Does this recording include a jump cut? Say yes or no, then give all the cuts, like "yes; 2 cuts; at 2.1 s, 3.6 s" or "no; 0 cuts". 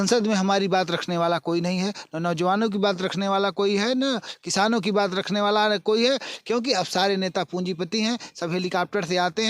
no; 0 cuts